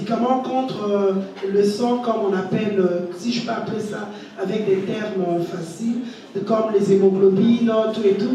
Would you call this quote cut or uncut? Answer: uncut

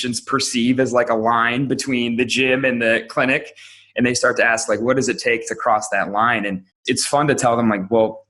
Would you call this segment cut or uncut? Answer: cut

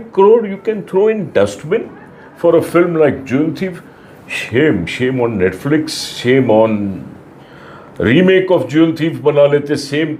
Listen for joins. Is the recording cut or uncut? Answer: uncut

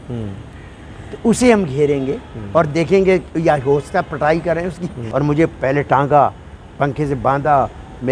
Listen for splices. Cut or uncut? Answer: cut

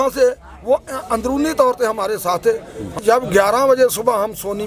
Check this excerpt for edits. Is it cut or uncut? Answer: cut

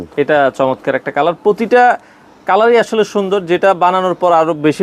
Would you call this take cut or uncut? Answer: uncut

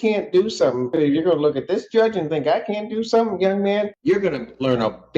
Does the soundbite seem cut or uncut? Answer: cut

